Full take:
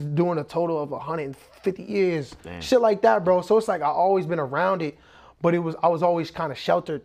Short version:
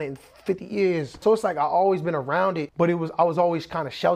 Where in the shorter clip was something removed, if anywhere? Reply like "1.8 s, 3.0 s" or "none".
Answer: 1.2 s, 2.7 s